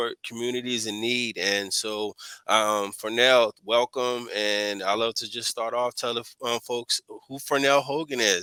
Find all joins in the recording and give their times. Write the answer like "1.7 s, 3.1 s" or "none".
none